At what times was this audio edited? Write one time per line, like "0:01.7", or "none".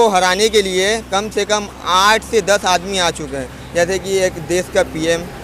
none